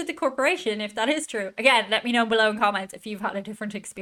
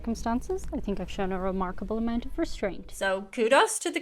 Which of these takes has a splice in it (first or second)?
second